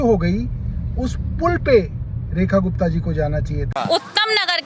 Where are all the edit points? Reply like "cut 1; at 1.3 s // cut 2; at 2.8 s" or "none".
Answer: cut 1; at 3.6 s